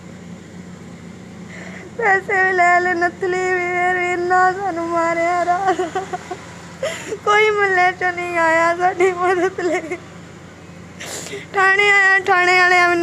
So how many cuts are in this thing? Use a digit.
0